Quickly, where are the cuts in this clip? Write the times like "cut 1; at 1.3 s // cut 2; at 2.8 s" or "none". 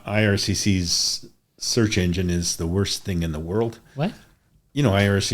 none